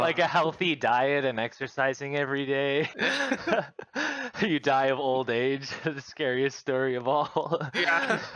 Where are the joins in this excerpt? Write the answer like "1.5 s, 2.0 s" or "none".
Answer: 2.9 s